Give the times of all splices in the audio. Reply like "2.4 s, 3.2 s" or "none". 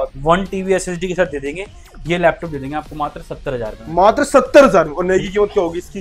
none